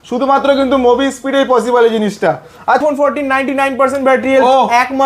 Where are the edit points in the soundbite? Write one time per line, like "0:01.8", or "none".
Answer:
0:02.9